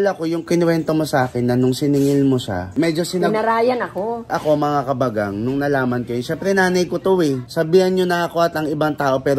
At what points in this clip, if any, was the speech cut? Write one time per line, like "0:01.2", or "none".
0:04.3
0:07.4